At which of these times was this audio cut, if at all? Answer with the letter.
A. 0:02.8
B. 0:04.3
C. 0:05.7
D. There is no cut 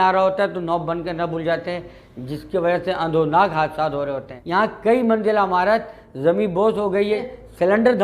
B